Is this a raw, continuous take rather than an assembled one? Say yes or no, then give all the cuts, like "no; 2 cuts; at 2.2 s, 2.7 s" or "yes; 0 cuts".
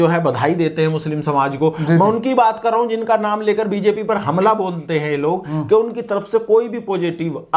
yes; 0 cuts